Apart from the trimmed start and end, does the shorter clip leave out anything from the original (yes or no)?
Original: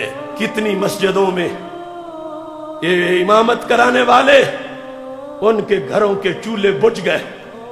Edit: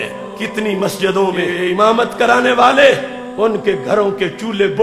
yes